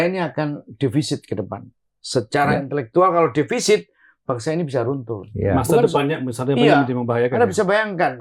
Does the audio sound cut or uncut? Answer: uncut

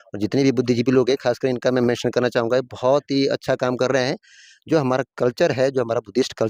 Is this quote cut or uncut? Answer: uncut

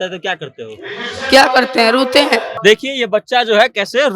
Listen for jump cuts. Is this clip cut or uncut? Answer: cut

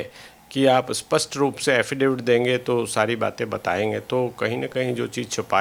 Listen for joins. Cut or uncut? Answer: uncut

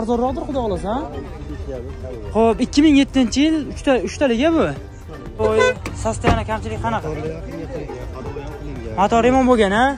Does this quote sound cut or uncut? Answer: cut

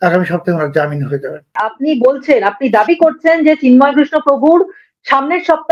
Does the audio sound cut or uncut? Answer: cut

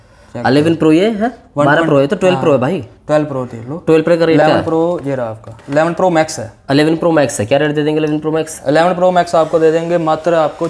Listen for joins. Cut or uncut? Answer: uncut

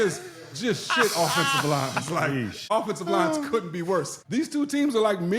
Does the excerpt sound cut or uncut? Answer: cut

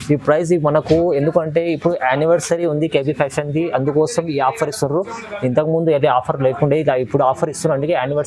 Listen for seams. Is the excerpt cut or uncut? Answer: uncut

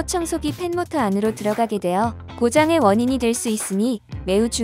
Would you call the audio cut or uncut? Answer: uncut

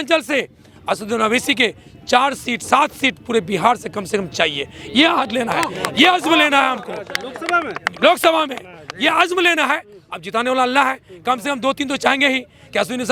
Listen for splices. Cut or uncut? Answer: uncut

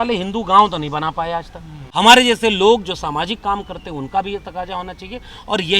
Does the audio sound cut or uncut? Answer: uncut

